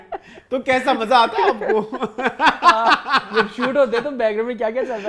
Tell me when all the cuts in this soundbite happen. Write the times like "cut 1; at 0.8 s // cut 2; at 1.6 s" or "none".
none